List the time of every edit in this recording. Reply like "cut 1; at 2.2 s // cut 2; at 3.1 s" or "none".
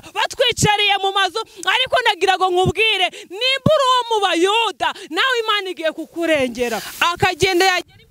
cut 1; at 6.9 s